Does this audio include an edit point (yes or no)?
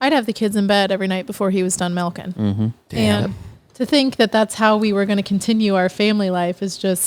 no